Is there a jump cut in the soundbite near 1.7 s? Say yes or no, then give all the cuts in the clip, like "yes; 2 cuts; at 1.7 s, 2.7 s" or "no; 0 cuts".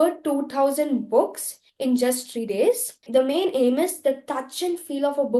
no; 1 cut; at 2.9 s